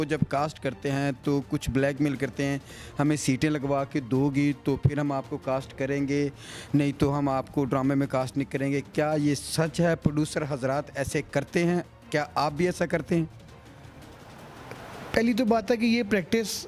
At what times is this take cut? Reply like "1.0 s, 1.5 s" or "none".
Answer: none